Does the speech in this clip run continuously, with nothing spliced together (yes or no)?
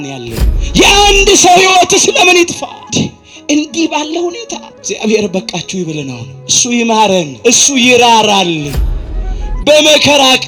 yes